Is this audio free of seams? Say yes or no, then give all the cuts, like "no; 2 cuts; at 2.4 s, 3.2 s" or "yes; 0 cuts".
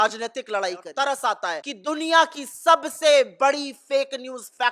no; 2 cuts; at 0.9 s, 1.7 s